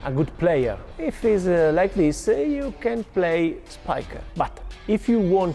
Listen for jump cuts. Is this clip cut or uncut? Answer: cut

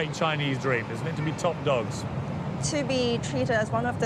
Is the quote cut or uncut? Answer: uncut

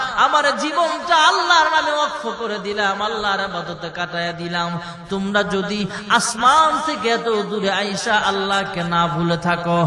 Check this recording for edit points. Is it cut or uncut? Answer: uncut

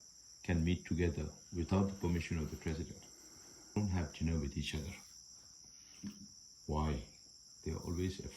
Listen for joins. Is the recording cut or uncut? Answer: cut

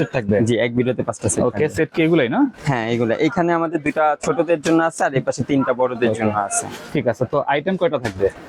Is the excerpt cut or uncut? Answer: uncut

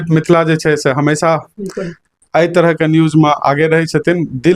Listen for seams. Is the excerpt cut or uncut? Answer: uncut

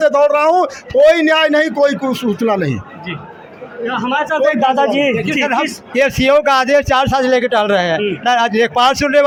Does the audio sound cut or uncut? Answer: uncut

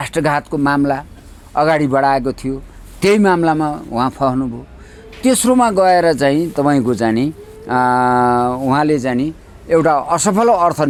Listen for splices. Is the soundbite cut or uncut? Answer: uncut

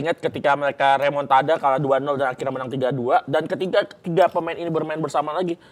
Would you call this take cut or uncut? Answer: uncut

